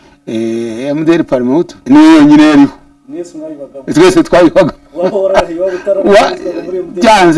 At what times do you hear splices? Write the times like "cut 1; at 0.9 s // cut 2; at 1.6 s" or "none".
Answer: cut 1; at 1.8 s